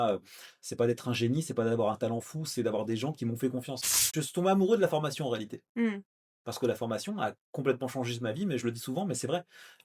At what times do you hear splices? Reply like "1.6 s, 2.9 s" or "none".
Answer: 4.0 s